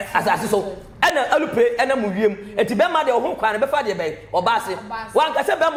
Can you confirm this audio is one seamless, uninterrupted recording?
yes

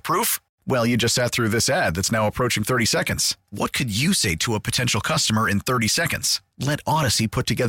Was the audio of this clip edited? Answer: no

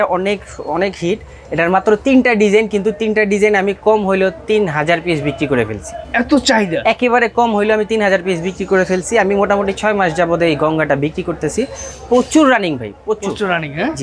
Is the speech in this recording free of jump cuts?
yes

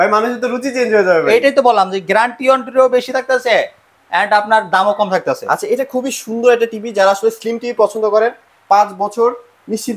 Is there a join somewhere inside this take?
no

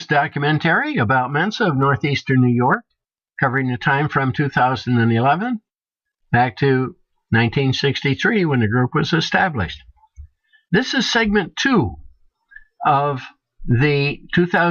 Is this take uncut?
yes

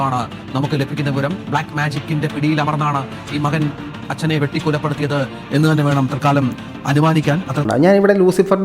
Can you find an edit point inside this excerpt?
yes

